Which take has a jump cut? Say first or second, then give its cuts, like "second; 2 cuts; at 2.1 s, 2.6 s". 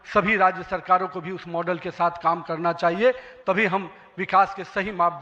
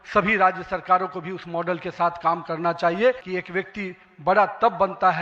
second; 1 cut; at 3.3 s